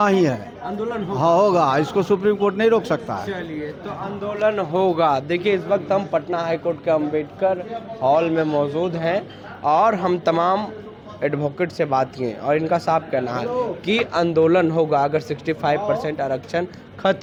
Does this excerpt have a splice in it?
no; 0 cuts

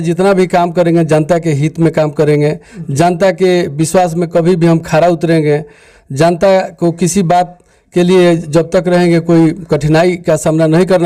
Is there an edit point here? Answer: no; 0 cuts

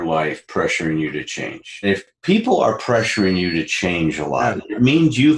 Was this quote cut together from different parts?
yes; 1 cut; at 2.1 s

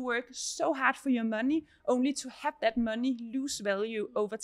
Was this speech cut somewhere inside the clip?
no; 0 cuts

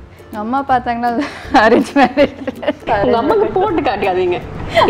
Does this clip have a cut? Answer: yes; 1 cut; at 2.9 s

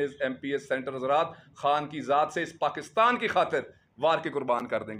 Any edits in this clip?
no; 0 cuts

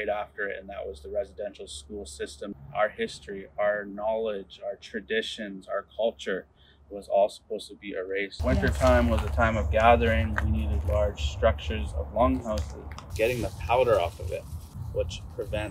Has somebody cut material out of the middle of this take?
yes; 3 cuts; at 2.5 s, 8.3 s, 13.0 s

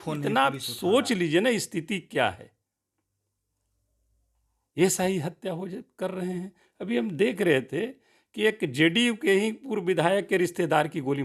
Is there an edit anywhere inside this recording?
no; 0 cuts

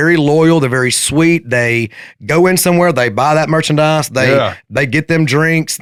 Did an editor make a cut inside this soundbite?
no; 0 cuts

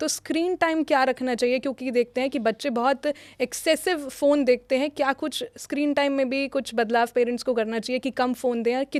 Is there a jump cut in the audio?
no; 0 cuts

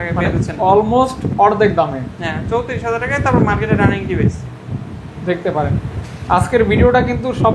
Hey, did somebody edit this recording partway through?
no; 0 cuts

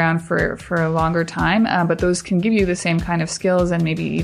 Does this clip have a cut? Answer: no; 0 cuts

